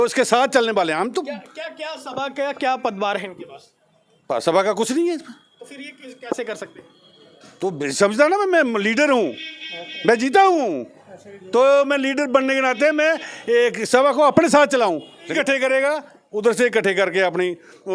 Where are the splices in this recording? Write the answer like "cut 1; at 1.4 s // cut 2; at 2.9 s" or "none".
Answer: cut 1; at 15.3 s